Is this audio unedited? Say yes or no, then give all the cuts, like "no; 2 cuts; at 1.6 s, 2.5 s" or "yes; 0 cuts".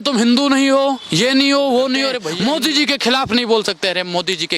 no; 1 cut; at 2.3 s